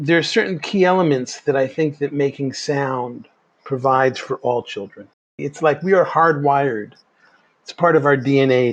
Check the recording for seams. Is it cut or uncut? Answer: cut